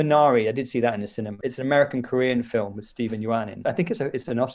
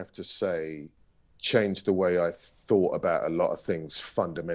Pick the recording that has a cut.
first; 2 cuts; at 1.4 s, 3.5 s

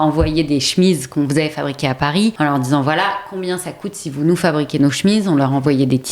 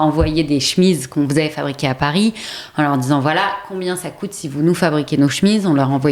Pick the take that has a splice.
first; 1 cut; at 2.4 s

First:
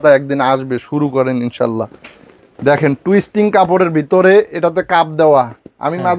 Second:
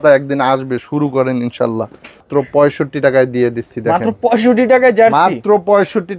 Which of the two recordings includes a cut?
second; 1 cut; at 2.3 s

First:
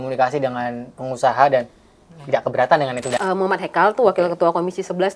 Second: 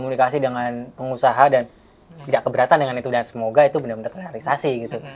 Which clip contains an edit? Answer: first; 1 cut; at 3.2 s

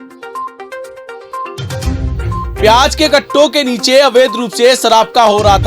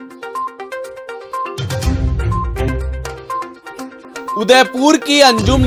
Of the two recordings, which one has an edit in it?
first; 1 cut; at 2.6 s

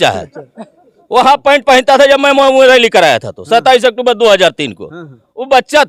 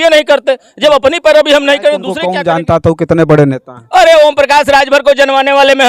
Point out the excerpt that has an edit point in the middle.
second; 1 cut; at 2.3 s

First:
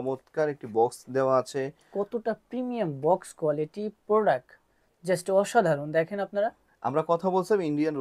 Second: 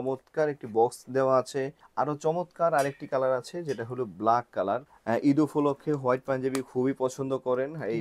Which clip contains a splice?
second; 2 cuts; at 1.8 s, 4.9 s

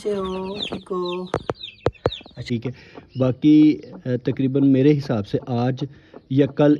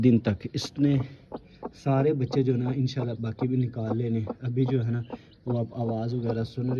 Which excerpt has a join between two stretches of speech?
first; 1 cut; at 2.3 s

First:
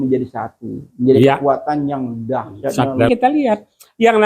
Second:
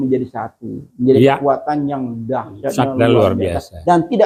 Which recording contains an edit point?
first; 1 cut; at 3.1 s

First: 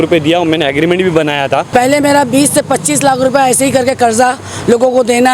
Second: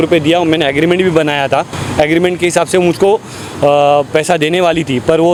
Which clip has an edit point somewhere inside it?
first; 1 cut; at 1.7 s

